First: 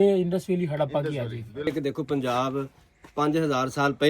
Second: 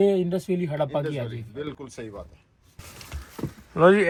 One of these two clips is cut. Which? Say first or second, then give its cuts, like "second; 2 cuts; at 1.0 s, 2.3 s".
first; 1 cut; at 1.7 s